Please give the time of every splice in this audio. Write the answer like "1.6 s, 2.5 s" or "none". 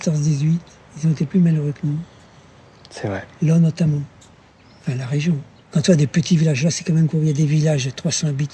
none